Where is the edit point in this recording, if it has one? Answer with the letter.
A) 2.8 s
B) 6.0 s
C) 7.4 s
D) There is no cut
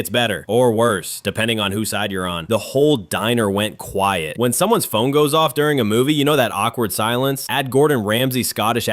D